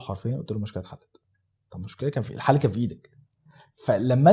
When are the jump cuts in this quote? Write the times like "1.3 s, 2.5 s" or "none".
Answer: none